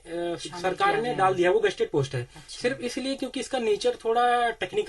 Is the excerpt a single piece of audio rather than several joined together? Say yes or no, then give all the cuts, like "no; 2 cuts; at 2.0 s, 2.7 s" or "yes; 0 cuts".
yes; 0 cuts